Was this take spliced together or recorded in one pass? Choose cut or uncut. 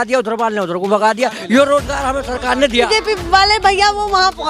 cut